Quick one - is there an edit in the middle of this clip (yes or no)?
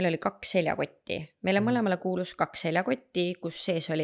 no